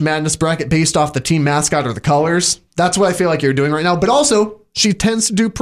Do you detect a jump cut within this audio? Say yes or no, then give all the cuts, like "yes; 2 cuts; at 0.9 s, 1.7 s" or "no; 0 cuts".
no; 0 cuts